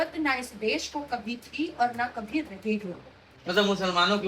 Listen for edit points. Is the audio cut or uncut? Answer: cut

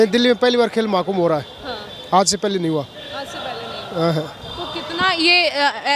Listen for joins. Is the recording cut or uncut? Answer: uncut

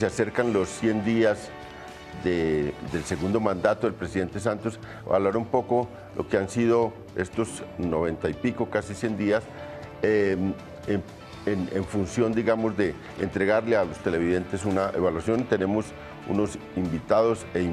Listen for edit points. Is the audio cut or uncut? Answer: uncut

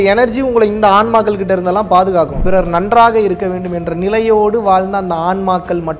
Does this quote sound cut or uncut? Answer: cut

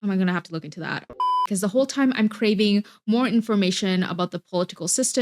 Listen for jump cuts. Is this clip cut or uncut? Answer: cut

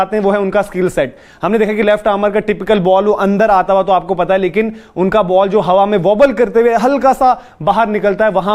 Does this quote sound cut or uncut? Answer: uncut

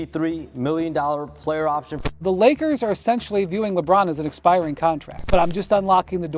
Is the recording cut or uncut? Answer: cut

